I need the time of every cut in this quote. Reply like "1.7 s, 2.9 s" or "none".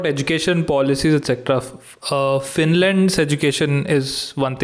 none